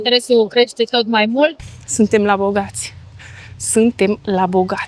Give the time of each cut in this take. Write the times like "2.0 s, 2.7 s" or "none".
1.6 s